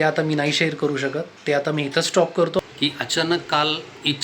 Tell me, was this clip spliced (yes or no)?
yes